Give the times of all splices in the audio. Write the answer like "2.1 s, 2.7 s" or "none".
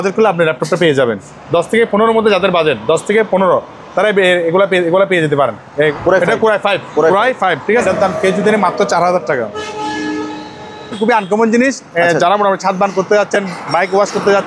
1.3 s, 5.9 s, 7.8 s, 10.9 s